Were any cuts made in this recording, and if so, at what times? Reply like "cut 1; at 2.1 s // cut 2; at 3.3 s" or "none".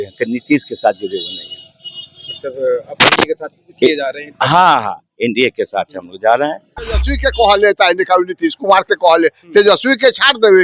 cut 1; at 7.2 s